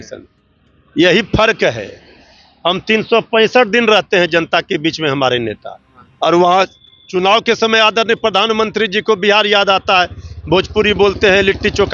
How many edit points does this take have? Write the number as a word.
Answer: zero